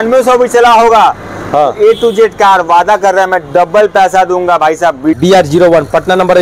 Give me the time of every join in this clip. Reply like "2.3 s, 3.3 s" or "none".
none